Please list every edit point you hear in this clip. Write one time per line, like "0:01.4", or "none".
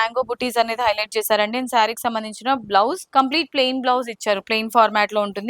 none